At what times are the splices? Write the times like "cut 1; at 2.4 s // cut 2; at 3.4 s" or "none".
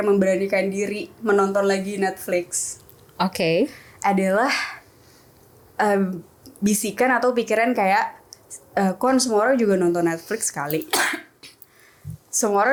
none